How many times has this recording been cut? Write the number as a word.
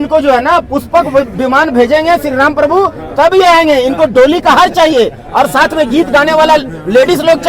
zero